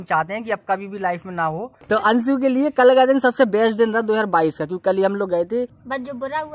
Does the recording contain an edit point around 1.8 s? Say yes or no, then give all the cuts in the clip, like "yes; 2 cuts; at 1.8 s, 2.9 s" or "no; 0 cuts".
yes; 2 cuts; at 1.8 s, 5.7 s